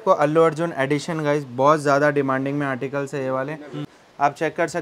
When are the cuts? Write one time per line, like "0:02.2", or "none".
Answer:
0:03.9